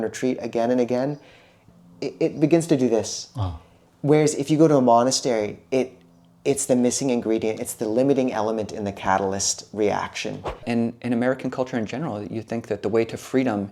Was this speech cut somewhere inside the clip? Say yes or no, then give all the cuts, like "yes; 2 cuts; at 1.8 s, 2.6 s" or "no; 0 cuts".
yes; 2 cuts; at 1.6 s, 10.6 s